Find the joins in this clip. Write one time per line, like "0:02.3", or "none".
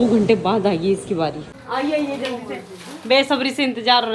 0:01.6